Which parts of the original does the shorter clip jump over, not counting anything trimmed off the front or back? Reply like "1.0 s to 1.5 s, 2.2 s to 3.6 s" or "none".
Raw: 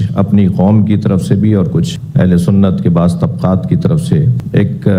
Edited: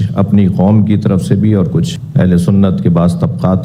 none

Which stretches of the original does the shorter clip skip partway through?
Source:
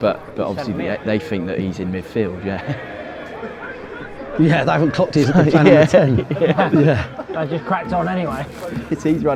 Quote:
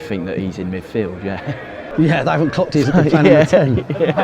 3.1 s to 4.3 s

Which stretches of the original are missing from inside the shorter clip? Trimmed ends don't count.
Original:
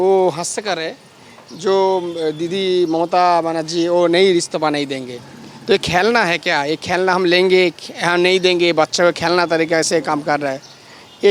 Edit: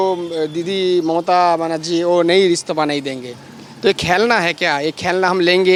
none

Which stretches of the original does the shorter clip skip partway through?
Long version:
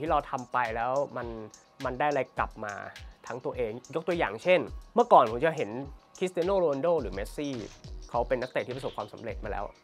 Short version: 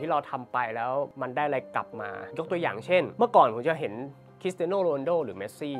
1.1 s to 1.8 s, 2.9 s to 3.8 s, 4.7 s to 4.9 s

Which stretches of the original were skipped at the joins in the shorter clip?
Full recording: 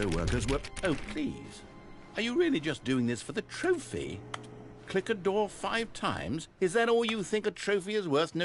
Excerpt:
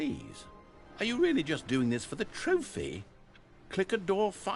none

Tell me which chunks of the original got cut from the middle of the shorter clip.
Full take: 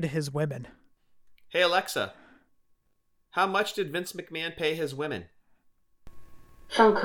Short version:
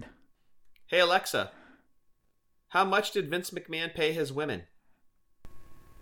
none

